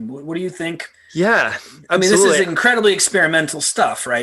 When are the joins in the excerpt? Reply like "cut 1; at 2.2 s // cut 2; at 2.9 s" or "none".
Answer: cut 1; at 0.9 s